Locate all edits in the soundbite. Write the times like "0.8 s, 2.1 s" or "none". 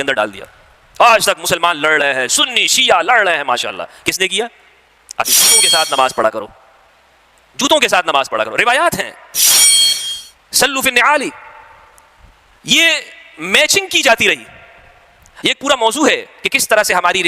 5.3 s